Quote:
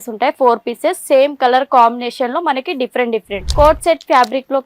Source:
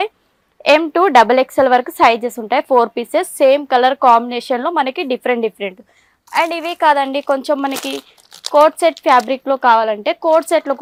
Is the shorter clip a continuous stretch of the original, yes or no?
no